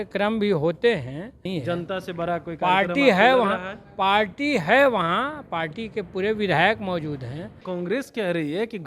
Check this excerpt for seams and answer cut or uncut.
cut